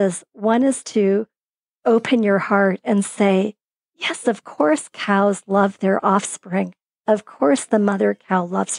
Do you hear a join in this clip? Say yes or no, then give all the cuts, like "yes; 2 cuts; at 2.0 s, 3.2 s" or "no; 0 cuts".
no; 0 cuts